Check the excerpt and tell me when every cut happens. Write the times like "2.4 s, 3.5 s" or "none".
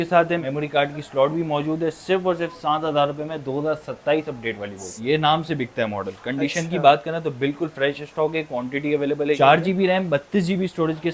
5.0 s, 9.4 s